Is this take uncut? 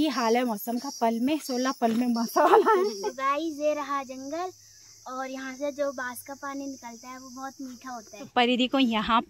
no; 2 cuts; at 3.1 s, 8.2 s

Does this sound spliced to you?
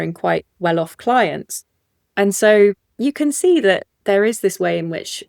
yes; 1 cut; at 3.9 s

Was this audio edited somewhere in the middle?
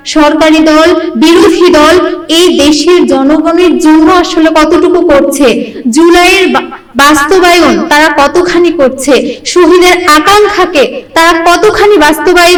no; 0 cuts

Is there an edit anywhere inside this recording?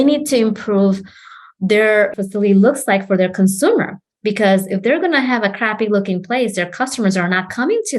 yes; 1 cut; at 2.1 s

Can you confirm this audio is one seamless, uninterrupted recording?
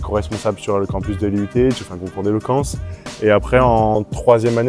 yes; 0 cuts

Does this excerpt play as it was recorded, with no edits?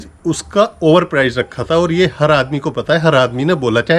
yes; 0 cuts

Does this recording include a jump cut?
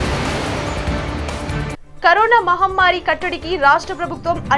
yes; 1 cut; at 1.9 s

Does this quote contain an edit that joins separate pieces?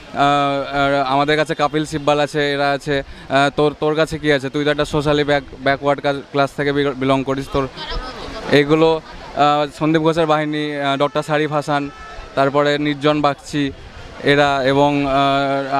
no; 0 cuts

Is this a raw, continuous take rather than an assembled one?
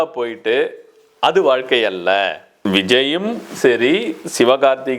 no; 1 cut; at 2.6 s

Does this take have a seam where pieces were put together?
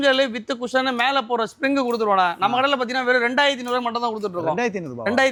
no; 0 cuts

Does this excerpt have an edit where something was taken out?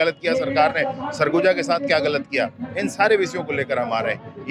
no; 0 cuts

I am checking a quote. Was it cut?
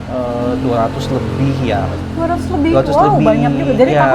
no; 0 cuts

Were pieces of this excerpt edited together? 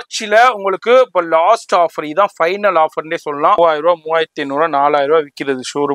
yes; 1 cut; at 3.6 s

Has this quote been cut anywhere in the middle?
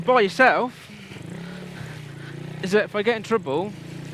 no; 0 cuts

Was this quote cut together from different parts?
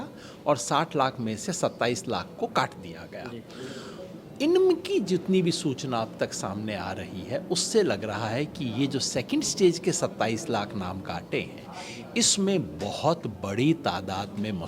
no; 0 cuts

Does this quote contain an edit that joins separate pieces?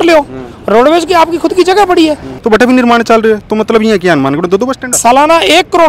yes; 2 cuts; at 2.3 s, 4.9 s

